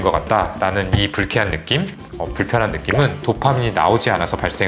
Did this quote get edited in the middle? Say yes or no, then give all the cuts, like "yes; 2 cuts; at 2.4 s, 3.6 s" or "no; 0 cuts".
no; 0 cuts